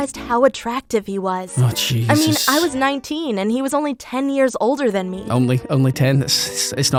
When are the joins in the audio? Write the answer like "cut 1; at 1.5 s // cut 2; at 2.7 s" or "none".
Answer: none